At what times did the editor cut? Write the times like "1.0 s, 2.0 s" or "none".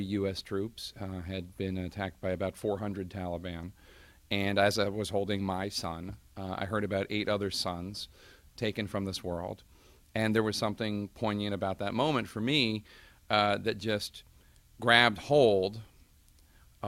7.9 s